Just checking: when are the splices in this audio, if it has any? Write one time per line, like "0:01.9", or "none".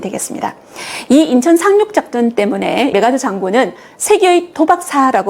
none